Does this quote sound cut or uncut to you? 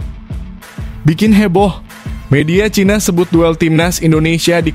cut